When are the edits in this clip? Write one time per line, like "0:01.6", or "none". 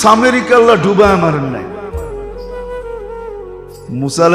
none